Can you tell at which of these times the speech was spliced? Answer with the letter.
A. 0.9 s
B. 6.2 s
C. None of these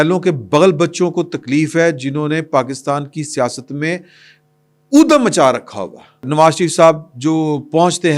B